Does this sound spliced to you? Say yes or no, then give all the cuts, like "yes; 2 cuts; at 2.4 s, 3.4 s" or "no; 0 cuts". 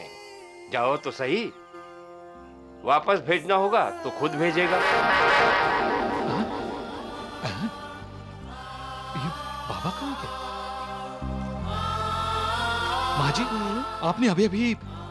no; 0 cuts